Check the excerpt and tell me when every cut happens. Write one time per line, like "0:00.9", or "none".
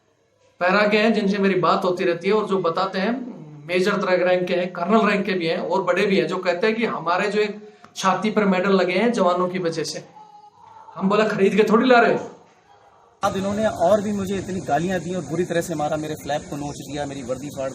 0:13.2